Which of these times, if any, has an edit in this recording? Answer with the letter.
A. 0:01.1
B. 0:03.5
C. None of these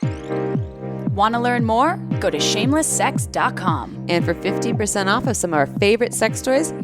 A